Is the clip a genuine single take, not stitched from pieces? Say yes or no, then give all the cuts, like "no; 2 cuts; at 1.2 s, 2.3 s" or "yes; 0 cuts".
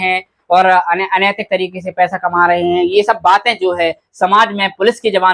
yes; 0 cuts